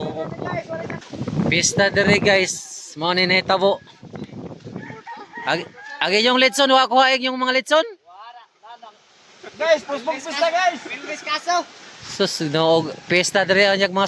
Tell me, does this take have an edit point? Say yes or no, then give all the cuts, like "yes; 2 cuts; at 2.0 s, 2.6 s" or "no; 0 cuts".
yes; 1 cut; at 1.0 s